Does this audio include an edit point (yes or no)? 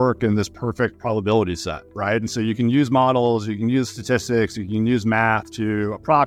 no